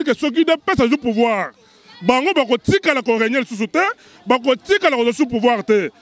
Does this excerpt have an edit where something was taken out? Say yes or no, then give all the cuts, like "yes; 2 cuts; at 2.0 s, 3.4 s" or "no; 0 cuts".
no; 0 cuts